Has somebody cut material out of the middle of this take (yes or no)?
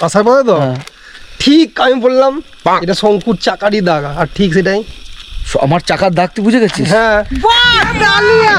no